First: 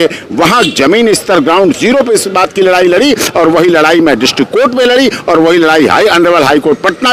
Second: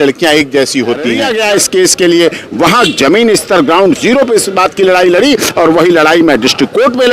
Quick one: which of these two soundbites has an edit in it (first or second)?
second